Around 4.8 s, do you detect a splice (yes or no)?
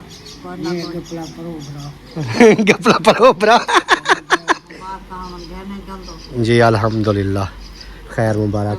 yes